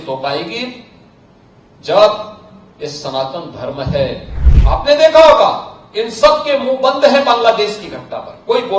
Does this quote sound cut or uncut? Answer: cut